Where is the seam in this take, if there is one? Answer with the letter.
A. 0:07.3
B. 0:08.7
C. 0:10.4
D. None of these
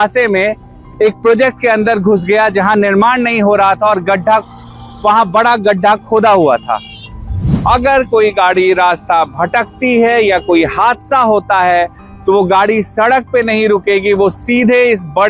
A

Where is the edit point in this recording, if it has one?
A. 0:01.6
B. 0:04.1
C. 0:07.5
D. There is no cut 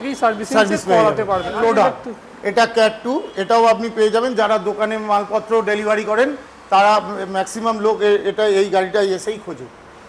A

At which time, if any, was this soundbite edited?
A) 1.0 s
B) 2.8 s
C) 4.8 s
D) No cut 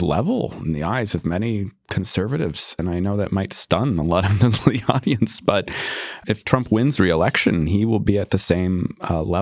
B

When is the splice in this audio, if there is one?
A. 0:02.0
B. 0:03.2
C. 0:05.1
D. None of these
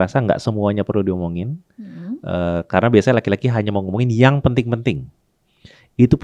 D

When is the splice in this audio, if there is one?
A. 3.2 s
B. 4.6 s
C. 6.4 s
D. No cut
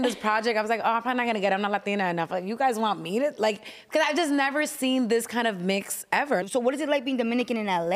C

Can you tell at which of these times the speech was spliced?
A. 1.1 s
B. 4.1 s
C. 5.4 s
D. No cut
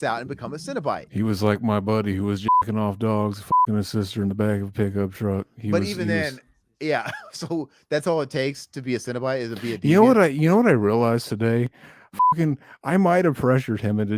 A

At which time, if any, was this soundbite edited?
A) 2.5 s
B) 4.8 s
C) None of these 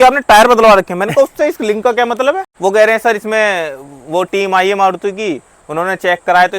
A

